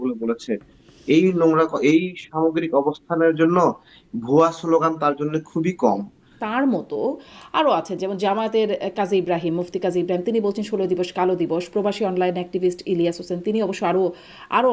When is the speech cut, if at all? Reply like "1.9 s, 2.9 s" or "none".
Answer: 6.3 s